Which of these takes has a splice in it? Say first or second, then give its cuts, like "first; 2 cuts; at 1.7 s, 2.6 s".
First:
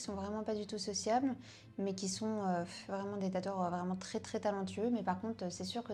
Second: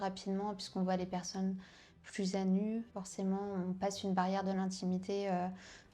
second; 1 cut; at 2.9 s